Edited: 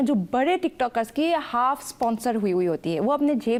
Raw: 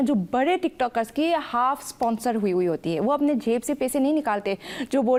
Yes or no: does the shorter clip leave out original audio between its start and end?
no